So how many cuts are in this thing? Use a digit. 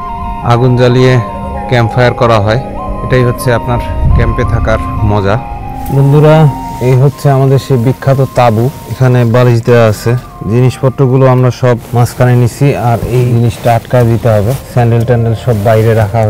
1